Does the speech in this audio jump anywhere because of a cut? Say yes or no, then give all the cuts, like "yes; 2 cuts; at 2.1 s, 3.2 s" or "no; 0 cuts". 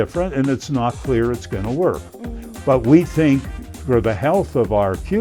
no; 0 cuts